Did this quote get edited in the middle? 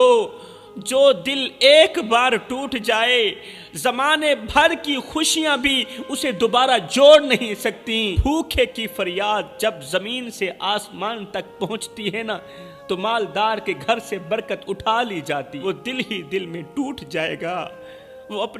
yes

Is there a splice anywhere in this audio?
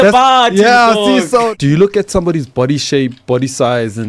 yes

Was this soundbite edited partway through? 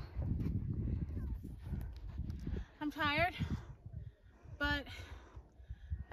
no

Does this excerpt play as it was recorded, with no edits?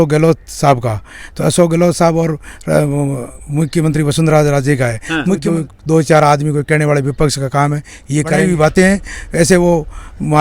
no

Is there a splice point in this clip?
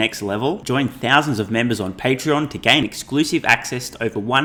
no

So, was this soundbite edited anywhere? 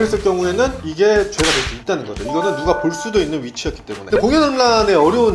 yes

